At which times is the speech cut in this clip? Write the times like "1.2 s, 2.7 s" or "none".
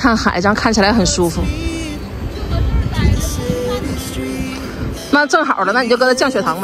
none

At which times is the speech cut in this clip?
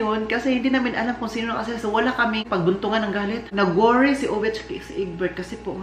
3.5 s

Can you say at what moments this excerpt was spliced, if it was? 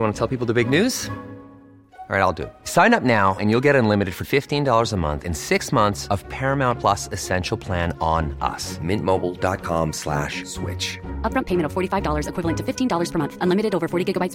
none

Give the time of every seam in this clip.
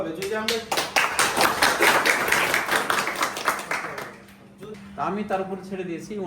4.6 s

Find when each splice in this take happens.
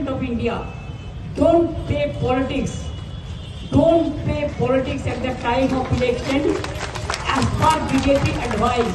none

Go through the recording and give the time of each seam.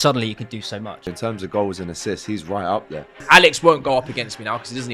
1.1 s, 3.2 s

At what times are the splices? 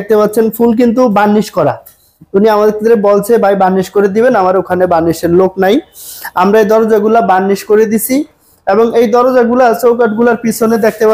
none

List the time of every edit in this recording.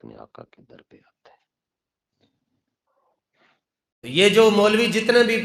3.5 s

